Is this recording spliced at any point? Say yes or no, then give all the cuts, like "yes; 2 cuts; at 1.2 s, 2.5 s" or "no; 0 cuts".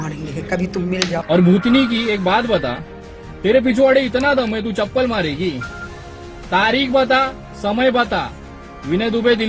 yes; 1 cut; at 1.2 s